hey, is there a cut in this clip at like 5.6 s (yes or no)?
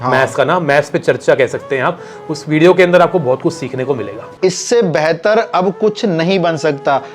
no